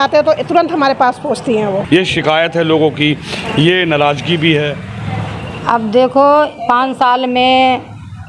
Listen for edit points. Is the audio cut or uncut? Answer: cut